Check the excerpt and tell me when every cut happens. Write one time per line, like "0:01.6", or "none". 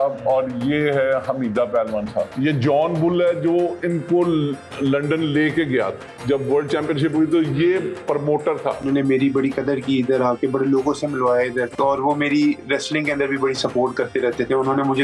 0:02.3
0:06.1
0:08.8
0:11.7